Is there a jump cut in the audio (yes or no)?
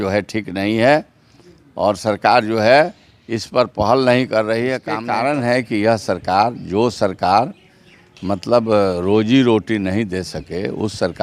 yes